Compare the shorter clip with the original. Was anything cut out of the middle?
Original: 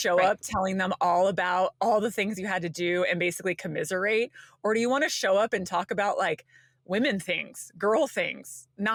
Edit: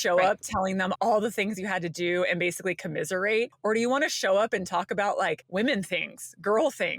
yes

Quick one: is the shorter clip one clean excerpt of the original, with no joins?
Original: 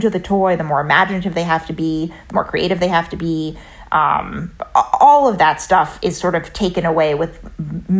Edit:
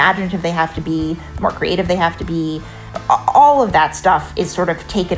no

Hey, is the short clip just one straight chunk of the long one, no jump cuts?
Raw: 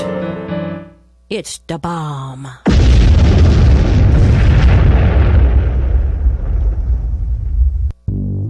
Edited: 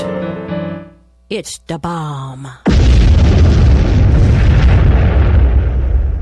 yes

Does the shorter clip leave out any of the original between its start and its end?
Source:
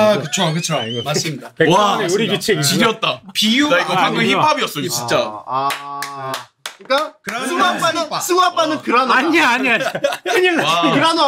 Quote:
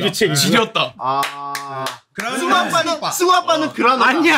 yes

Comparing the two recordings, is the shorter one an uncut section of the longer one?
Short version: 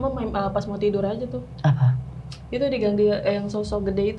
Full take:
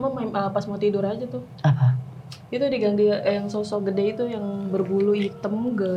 yes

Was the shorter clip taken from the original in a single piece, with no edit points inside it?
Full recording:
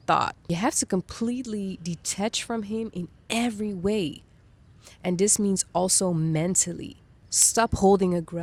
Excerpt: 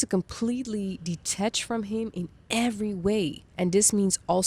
no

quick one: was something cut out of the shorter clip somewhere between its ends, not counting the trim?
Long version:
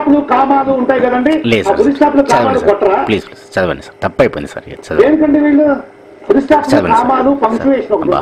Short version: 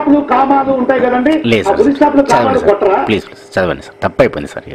no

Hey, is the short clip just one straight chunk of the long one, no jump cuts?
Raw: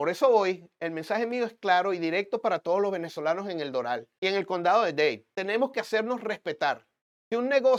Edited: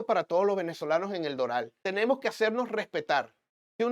no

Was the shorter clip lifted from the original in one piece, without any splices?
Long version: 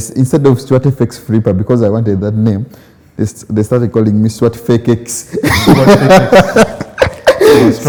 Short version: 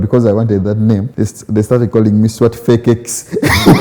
no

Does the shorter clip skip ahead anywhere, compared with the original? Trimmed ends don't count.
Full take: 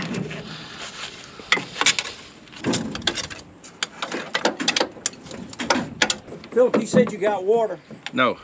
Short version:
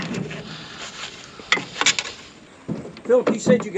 yes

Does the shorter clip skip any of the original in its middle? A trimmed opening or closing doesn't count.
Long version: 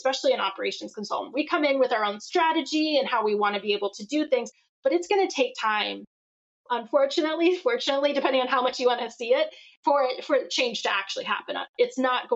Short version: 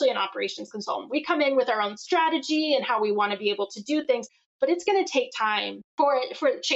yes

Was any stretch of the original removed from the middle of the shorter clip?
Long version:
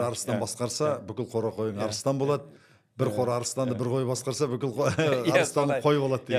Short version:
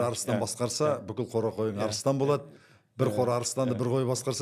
no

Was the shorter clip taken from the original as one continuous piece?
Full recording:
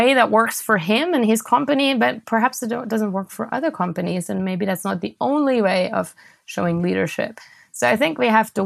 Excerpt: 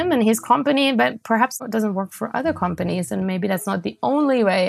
no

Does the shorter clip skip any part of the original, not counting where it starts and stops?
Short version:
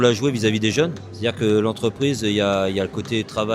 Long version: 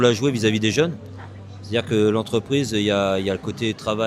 yes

